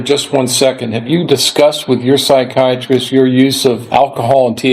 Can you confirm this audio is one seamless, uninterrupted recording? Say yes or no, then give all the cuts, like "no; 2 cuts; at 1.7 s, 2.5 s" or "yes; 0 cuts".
no; 1 cut; at 3.8 s